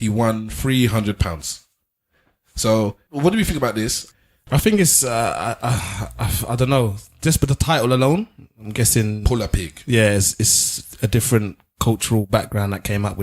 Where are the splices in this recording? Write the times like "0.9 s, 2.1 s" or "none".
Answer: 3.0 s, 4.1 s